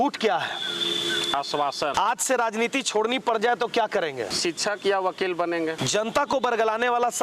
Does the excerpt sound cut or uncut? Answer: cut